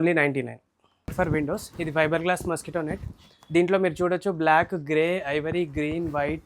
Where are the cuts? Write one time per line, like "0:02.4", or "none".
0:01.1

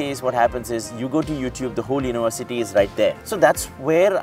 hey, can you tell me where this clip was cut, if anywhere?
0:03.2

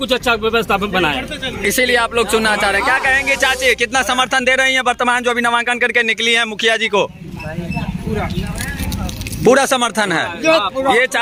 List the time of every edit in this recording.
none

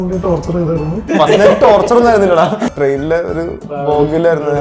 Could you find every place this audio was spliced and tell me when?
0:01.1
0:02.7

